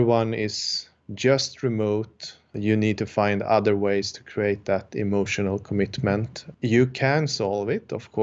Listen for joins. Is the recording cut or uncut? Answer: cut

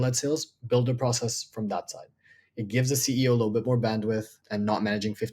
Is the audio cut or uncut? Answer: cut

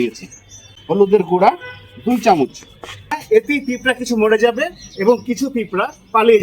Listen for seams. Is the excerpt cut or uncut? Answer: cut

